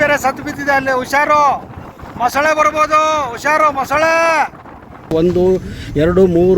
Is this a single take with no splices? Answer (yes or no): no